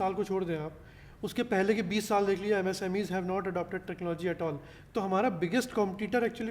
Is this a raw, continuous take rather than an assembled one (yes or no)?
no